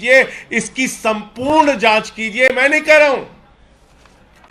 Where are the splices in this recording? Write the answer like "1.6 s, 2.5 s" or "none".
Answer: none